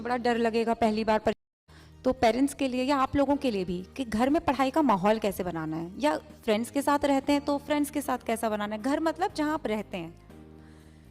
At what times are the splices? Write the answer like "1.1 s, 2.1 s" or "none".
1.3 s